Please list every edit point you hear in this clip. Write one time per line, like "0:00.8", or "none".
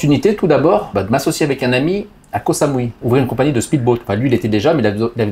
0:00.9
0:03.0

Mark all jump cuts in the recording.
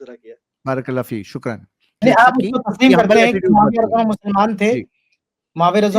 0:02.0

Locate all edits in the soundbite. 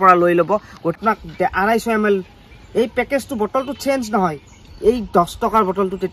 0:01.0

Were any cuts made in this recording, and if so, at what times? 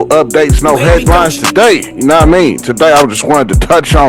none

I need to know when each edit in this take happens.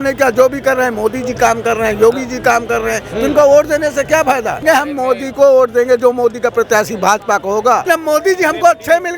0:04.6
0:07.8

